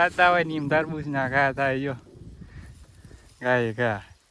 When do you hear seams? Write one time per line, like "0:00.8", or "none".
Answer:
none

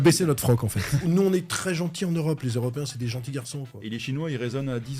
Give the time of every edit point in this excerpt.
0:01.0
0:03.8

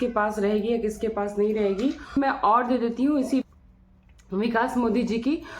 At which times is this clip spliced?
0:02.1
0:03.4

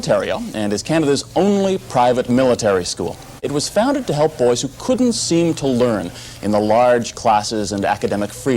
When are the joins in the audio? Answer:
0:03.4

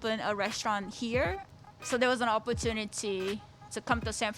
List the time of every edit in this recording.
0:01.4

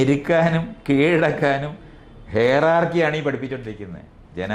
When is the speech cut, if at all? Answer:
none

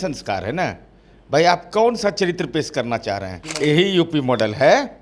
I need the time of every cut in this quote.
0:03.4

